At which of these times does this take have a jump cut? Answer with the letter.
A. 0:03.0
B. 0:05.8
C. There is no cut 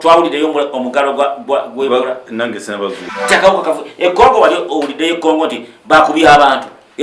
A